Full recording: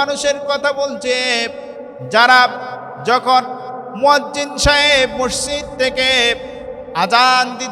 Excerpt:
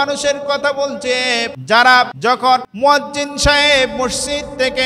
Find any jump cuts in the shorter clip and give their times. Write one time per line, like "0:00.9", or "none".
0:01.5
0:02.4